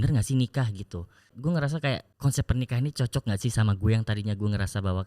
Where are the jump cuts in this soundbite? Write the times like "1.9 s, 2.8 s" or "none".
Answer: 1.3 s, 2.1 s